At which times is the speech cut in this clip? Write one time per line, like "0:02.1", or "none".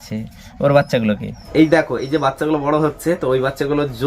0:01.3